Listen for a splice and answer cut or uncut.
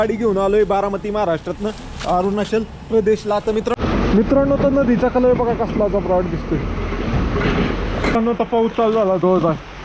cut